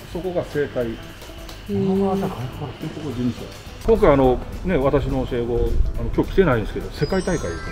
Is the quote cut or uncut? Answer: cut